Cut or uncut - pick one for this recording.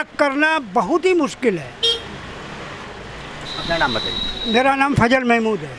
uncut